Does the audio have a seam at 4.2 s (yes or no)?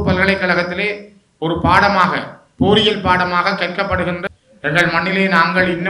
yes